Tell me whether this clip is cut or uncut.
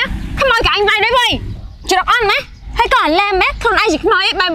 uncut